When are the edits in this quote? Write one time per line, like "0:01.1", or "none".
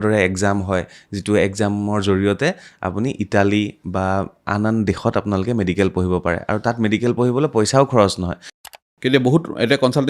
0:08.6